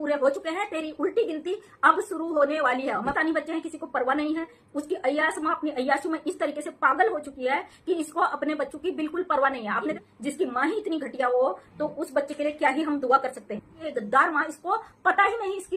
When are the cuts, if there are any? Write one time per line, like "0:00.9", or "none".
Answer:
0:03.1
0:10.0
0:13.8